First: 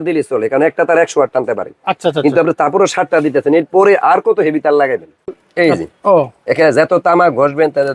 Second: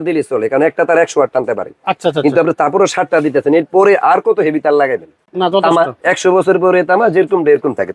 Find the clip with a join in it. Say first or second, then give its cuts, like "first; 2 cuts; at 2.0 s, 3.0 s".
first; 1 cut; at 5.3 s